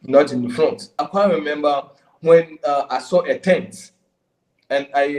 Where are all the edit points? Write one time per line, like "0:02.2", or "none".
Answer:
0:01.0